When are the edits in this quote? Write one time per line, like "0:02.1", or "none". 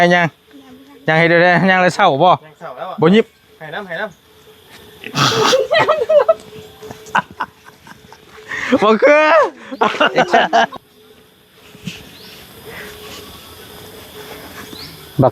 0:10.7